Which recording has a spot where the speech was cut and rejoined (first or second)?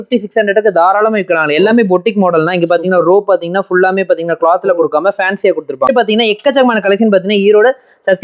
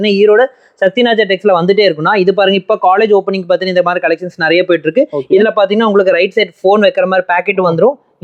first